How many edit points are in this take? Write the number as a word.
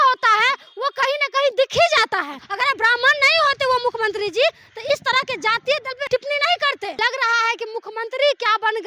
three